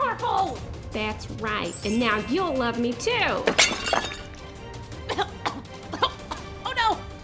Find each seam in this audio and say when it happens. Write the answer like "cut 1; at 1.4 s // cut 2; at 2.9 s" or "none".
none